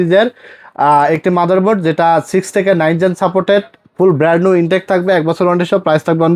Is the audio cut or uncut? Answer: uncut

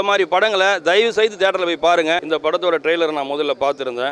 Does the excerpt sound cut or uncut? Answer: cut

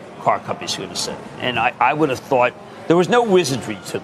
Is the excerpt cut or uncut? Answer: uncut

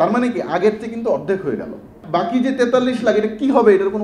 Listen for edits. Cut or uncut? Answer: cut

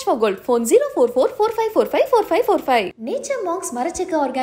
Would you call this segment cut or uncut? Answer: uncut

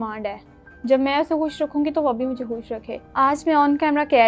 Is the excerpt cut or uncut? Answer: cut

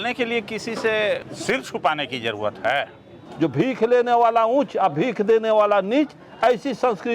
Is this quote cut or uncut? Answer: cut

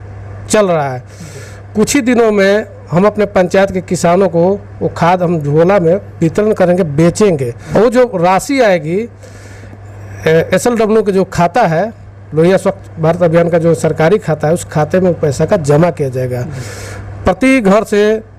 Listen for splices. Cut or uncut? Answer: uncut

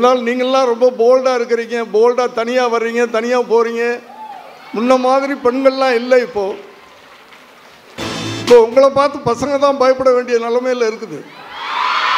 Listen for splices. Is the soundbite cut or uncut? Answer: uncut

